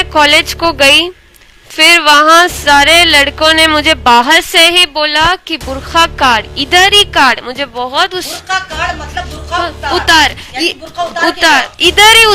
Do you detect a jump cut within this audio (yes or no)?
no